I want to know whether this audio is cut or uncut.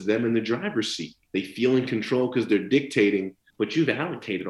cut